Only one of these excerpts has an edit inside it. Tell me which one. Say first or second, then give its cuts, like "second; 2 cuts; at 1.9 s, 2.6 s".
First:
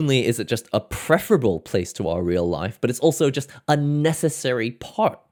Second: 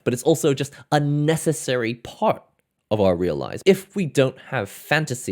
second; 1 cut; at 3.5 s